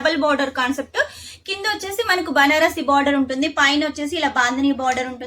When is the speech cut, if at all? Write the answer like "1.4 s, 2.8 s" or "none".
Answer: none